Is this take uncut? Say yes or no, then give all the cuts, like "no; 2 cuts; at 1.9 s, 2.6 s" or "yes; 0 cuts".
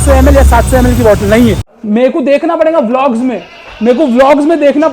no; 1 cut; at 1.7 s